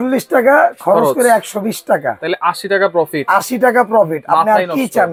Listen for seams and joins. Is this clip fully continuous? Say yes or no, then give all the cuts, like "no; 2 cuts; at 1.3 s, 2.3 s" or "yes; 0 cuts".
yes; 0 cuts